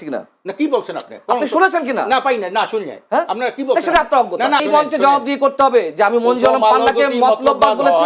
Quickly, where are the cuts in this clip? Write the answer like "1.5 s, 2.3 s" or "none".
4.6 s